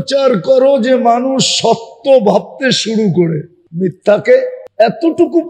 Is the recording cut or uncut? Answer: cut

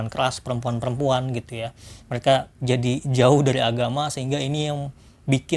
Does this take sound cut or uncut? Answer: uncut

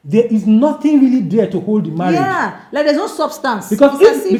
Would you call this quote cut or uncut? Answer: uncut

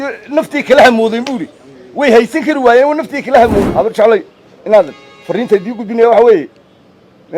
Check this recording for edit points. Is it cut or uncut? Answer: cut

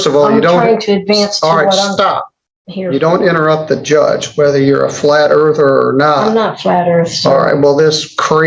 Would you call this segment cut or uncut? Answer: uncut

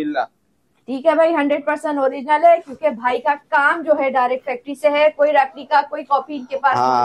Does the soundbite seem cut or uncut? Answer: uncut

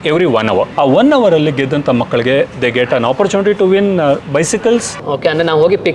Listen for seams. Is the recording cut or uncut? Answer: cut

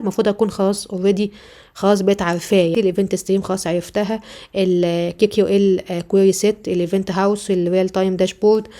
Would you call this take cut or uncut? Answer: cut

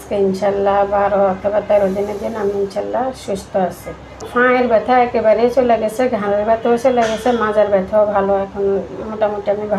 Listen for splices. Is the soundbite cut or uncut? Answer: cut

